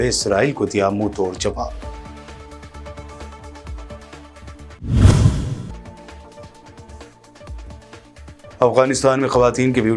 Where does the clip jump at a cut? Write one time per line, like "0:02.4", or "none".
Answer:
none